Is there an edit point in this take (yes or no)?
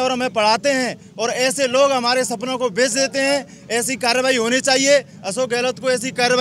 no